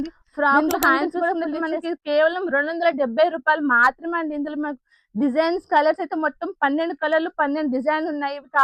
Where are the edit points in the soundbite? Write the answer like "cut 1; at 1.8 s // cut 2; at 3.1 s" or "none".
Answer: cut 1; at 1.3 s